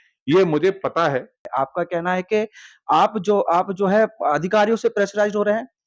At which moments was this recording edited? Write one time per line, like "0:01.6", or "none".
0:01.4